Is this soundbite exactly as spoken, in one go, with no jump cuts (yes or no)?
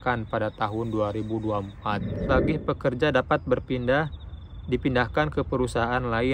no